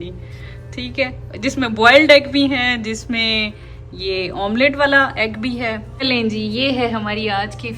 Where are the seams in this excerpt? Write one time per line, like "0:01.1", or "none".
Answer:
0:05.9